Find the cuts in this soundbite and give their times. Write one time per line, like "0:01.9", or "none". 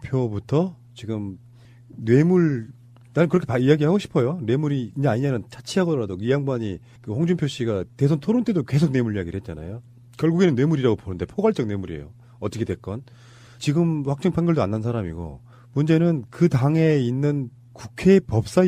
0:07.6